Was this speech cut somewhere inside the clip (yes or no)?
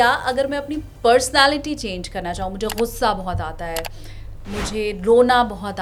no